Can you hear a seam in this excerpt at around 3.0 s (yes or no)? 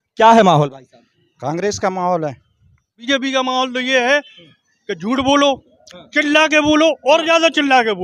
yes